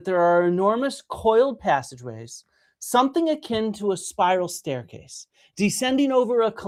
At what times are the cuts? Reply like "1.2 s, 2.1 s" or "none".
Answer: none